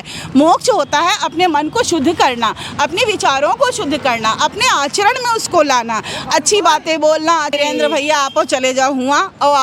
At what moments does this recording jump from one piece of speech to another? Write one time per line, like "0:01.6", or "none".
0:07.5

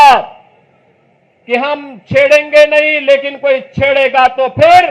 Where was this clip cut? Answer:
none

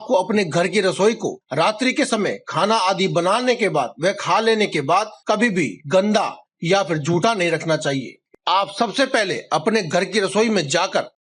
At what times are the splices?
0:08.3

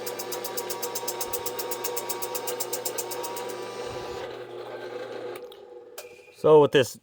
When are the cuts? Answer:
0:04.9

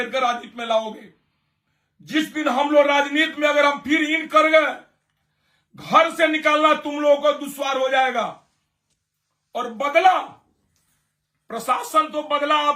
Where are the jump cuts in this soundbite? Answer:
none

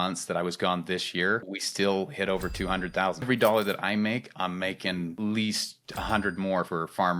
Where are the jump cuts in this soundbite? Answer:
0:01.5
0:03.3

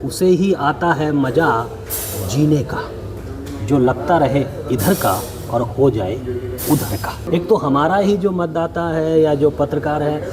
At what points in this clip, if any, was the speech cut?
0:07.2

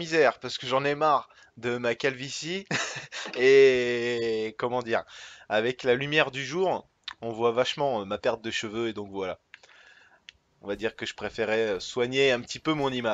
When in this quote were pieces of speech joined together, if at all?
0:01.7

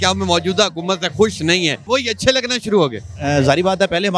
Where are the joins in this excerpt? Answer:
0:01.8

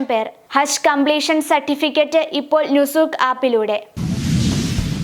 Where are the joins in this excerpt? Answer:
0:03.9

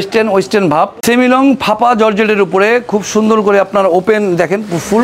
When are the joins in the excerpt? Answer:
0:01.0

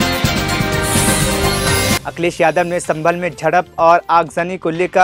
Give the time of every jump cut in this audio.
0:02.0

